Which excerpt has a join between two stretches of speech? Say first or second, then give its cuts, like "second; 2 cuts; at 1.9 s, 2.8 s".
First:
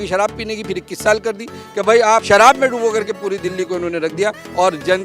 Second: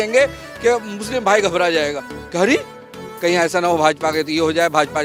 first; 1 cut; at 2.2 s